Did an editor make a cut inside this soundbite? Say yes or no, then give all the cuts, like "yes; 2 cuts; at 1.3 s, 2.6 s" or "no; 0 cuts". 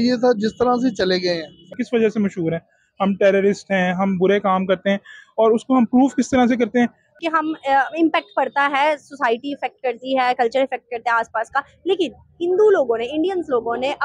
yes; 2 cuts; at 1.8 s, 7.2 s